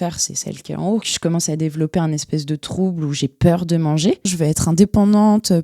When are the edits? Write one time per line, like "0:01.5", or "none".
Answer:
0:01.1
0:04.3